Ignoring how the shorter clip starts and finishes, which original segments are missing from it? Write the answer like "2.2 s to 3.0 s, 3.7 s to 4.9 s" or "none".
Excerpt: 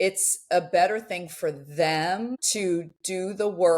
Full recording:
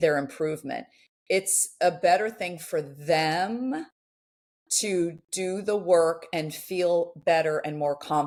3.6 s to 4.6 s